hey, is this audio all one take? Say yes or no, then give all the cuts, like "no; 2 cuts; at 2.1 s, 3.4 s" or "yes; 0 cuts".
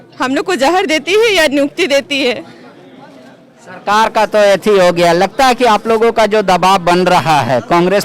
yes; 0 cuts